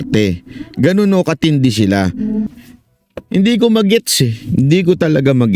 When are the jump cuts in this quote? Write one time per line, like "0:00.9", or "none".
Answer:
0:02.5

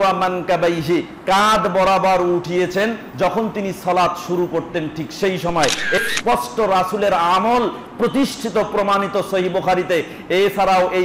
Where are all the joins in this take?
0:06.0

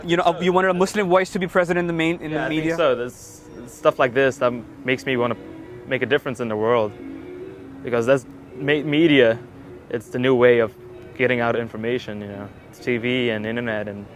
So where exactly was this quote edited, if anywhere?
none

